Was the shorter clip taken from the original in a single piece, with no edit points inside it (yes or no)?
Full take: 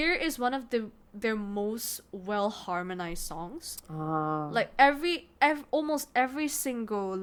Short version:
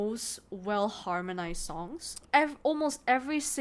no